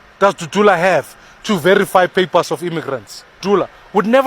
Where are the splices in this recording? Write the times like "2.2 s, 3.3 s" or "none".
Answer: 3.4 s